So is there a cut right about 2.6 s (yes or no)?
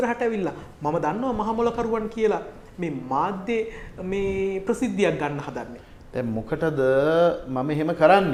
no